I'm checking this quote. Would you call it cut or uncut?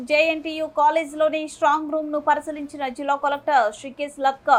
uncut